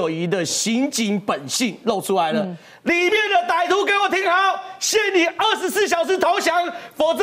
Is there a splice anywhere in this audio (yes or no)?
no